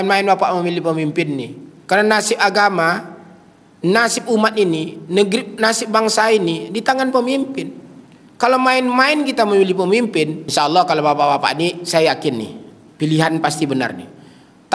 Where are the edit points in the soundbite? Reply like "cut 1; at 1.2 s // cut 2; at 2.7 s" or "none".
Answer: cut 1; at 10.4 s